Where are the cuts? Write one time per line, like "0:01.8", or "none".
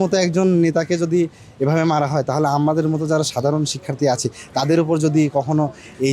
none